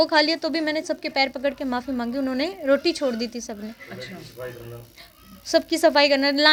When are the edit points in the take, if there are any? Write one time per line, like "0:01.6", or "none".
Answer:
none